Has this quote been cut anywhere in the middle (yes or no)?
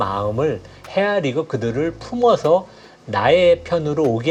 no